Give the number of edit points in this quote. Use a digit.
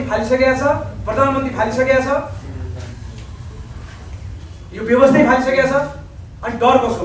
0